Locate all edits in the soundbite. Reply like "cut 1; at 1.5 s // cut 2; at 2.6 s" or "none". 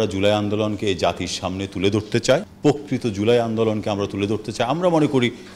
cut 1; at 2.5 s